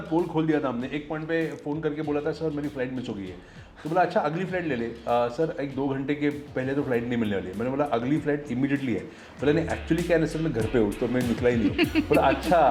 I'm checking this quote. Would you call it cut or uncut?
uncut